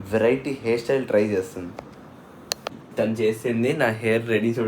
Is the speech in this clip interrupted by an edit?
yes; 1 cut; at 2.6 s

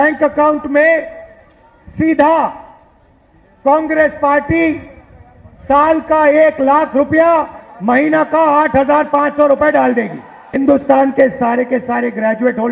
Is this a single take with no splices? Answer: no; 1 cut; at 10.4 s

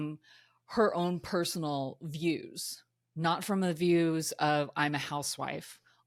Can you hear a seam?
no; 0 cuts

